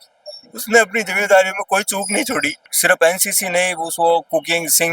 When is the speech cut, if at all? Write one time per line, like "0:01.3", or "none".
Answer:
0:02.6